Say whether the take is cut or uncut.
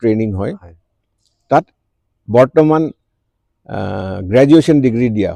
uncut